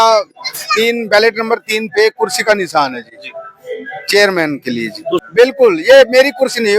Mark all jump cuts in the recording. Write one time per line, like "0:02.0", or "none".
0:05.2